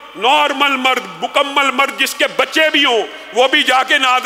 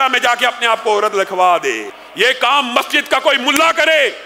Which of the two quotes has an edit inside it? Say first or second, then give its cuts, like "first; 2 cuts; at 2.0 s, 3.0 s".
second; 1 cut; at 2.0 s